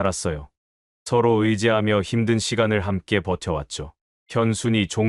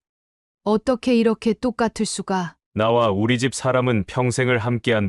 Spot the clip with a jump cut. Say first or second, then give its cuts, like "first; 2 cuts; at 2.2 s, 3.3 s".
second; 1 cut; at 2.6 s